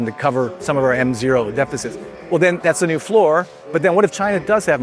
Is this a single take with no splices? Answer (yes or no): yes